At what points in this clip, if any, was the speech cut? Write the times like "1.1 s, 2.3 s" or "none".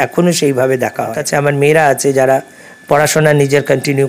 1.2 s